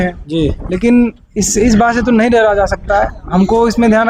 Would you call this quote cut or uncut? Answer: uncut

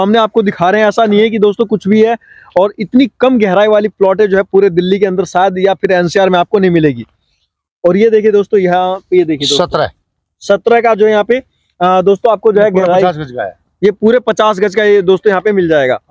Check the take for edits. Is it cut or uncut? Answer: uncut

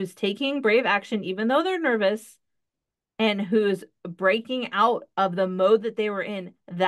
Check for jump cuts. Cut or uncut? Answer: uncut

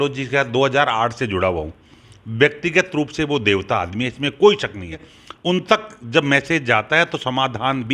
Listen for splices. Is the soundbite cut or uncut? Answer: cut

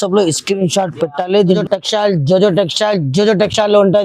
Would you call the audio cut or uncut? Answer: cut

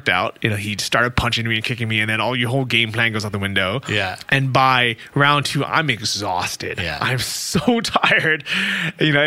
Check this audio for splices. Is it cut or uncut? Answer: uncut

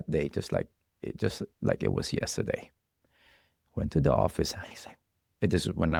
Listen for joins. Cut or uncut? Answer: uncut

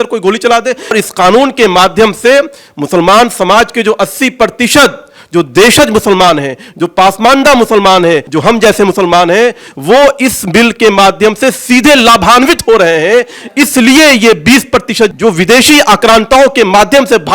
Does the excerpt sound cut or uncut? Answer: cut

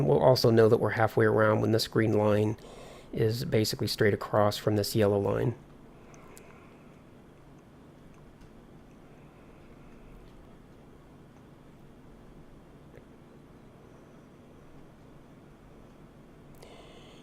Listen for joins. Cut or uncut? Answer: uncut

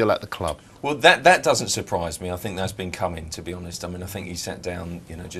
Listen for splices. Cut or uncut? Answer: cut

